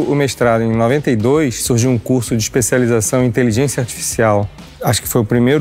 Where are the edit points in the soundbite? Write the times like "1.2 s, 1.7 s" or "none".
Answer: none